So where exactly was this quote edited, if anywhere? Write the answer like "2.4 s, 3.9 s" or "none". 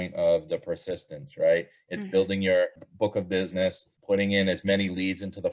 2.8 s, 3.9 s